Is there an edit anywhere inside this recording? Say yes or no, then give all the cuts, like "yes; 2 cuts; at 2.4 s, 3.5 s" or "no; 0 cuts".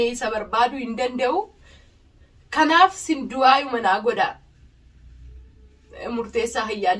no; 0 cuts